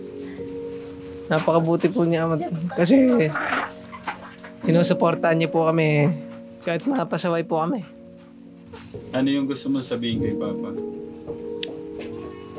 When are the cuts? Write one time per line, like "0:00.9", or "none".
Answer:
0:01.2